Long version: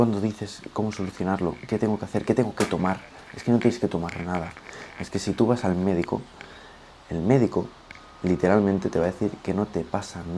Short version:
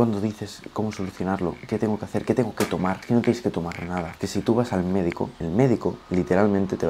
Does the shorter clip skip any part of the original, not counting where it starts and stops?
yes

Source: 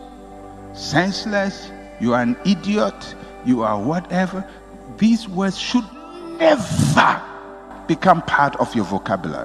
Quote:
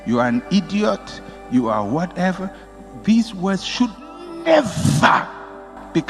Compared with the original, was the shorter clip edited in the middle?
no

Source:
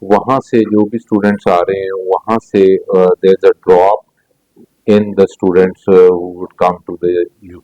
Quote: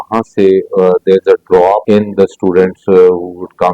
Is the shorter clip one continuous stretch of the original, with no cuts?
no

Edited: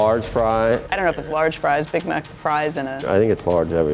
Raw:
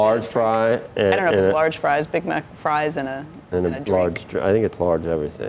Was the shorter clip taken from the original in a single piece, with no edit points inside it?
no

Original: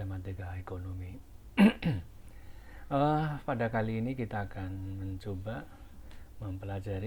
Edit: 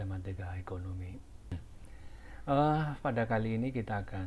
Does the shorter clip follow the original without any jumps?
no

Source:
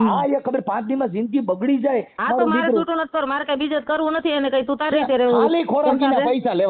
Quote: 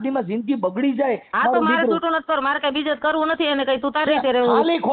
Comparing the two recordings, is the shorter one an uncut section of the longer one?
yes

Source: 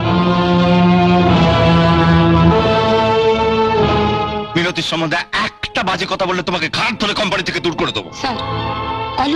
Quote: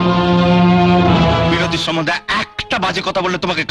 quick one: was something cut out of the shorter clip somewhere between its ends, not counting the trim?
yes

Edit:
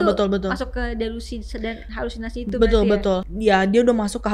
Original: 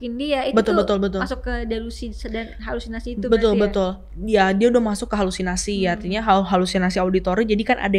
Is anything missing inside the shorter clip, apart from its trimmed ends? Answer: yes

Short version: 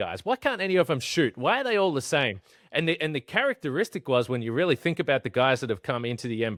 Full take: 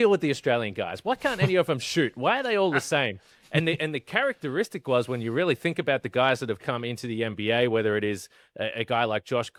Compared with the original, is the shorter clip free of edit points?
yes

